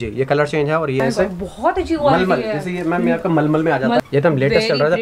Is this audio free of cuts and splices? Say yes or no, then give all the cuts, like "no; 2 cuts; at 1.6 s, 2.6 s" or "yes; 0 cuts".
no; 2 cuts; at 1.0 s, 4.0 s